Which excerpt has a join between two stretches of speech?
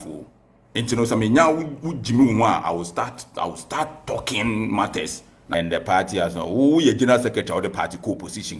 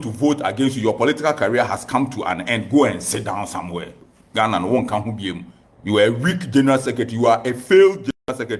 first; 1 cut; at 5.4 s

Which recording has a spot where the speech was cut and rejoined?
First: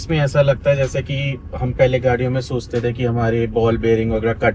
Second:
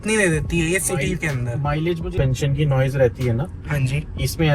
second; 1 cut; at 2.1 s

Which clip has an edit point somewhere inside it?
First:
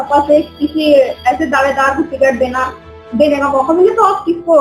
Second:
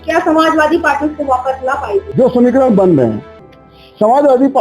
second; 1 cut; at 2.1 s

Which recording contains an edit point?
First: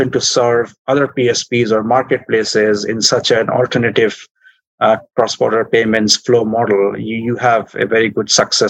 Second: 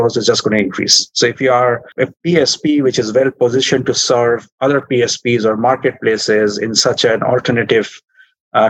second; 1 cut; at 1.9 s

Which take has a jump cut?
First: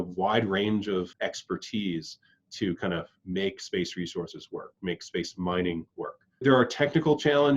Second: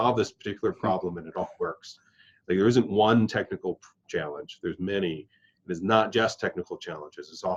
first; 2 cuts; at 1.1 s, 6.4 s

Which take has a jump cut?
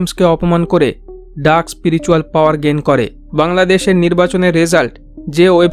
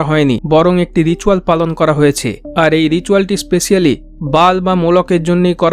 first; 1 cut; at 3.2 s

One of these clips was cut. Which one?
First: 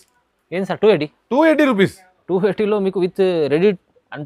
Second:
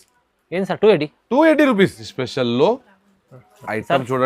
second; 1 cut; at 2.1 s

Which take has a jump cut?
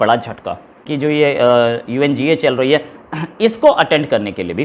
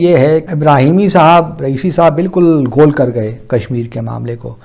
first; 1 cut; at 0.9 s

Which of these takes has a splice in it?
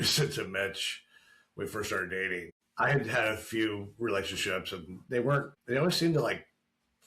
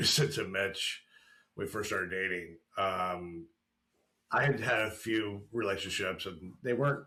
first; 2 cuts; at 2.6 s, 5.5 s

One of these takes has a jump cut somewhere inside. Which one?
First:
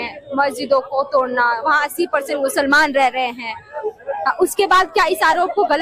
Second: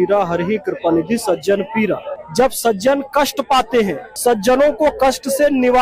second; 2 cuts; at 2.2 s, 4.1 s

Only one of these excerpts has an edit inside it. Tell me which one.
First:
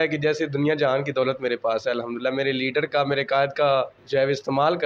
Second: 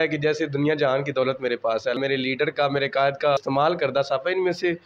second; 2 cuts; at 2.0 s, 3.4 s

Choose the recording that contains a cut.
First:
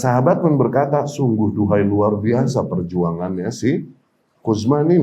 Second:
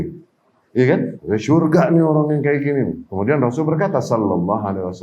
second; 2 cuts; at 1.2 s, 3.0 s

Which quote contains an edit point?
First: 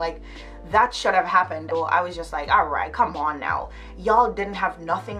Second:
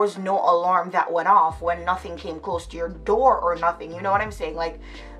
first; 1 cut; at 1.7 s

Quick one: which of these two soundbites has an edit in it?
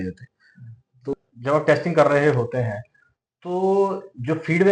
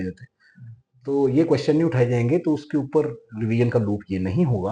first; 1 cut; at 1.1 s

